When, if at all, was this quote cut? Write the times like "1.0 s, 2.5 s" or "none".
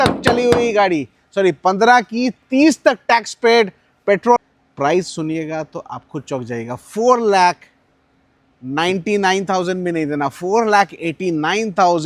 4.4 s